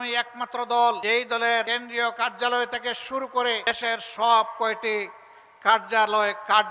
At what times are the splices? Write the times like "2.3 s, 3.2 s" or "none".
1.5 s, 3.7 s